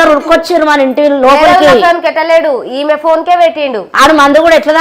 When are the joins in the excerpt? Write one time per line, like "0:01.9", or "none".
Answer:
0:03.8